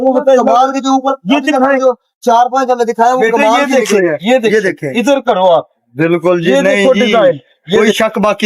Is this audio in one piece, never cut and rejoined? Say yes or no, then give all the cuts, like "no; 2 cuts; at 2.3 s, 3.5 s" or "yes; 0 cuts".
yes; 0 cuts